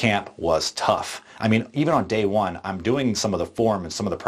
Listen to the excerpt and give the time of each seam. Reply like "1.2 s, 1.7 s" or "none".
none